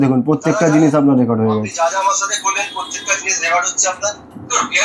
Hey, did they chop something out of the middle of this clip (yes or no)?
no